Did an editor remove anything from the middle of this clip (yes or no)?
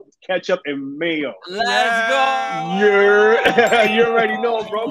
no